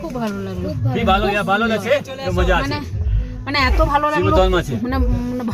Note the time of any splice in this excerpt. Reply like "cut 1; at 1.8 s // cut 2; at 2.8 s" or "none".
none